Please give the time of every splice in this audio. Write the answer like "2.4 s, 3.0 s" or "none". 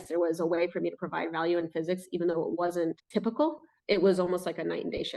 3.8 s

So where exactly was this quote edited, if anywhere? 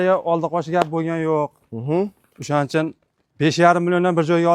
none

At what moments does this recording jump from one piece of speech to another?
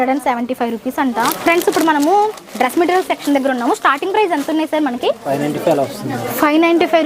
1.3 s, 5.2 s

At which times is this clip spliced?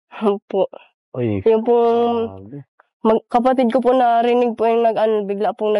1.5 s

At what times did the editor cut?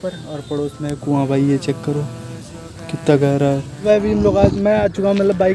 3.7 s

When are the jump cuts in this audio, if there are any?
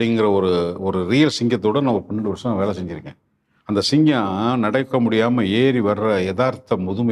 none

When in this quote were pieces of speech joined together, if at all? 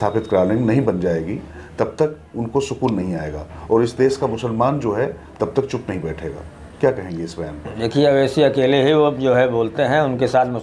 none

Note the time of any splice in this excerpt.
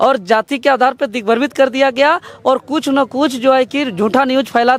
none

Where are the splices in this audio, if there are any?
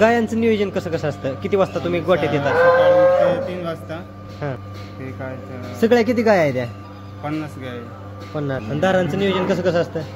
4.6 s, 8.6 s

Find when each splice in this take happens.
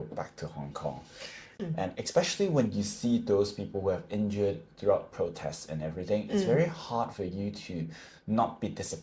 1.5 s

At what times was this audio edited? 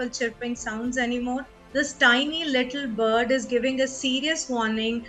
1.5 s

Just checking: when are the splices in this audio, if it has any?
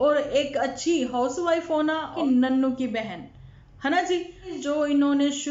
2.2 s, 4.6 s

